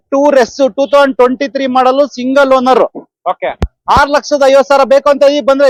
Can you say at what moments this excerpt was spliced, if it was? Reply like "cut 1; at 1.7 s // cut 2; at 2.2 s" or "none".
none